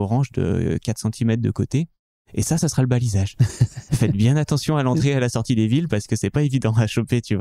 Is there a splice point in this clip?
no; 0 cuts

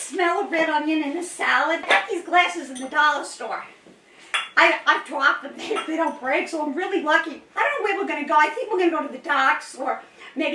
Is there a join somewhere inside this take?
yes; 2 cuts; at 1.8 s, 7.5 s

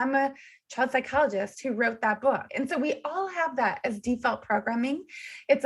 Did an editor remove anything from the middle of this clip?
yes; 1 cut; at 2.5 s

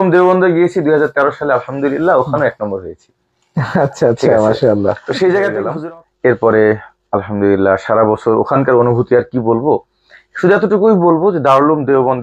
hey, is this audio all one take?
no; 1 cut; at 5.7 s

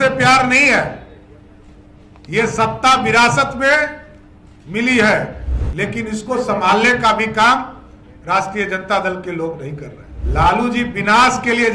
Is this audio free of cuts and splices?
no; 1 cut; at 10.1 s

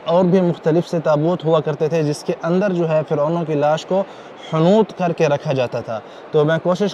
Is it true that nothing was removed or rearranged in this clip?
yes; 0 cuts

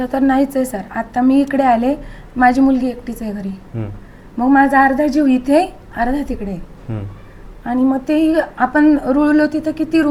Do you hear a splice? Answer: no; 0 cuts

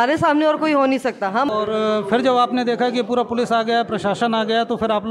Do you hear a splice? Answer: yes; 1 cut; at 1.5 s

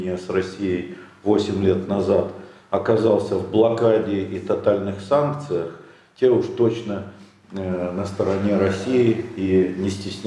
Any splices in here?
no; 0 cuts

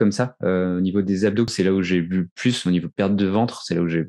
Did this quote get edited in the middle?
yes; 1 cut; at 1.5 s

